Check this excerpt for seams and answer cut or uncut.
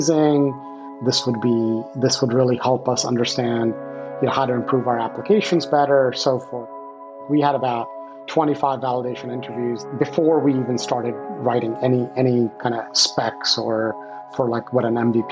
cut